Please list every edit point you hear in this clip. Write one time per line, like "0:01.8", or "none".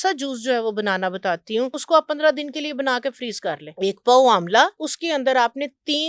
0:01.8
0:03.7
0:04.9